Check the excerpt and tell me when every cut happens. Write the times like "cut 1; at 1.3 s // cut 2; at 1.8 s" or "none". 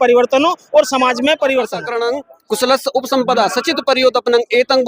cut 1; at 1.9 s